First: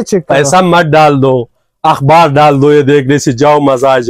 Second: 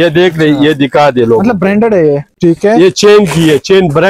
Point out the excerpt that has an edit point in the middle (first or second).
second